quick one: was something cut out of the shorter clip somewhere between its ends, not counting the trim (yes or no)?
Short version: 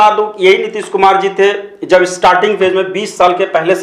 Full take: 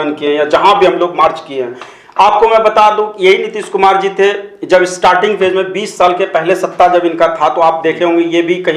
no